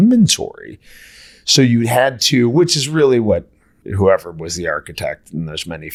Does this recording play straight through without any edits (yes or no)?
yes